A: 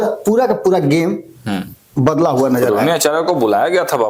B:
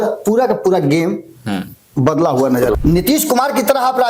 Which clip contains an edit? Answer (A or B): B